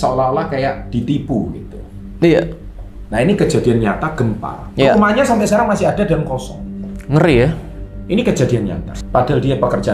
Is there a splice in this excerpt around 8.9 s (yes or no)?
yes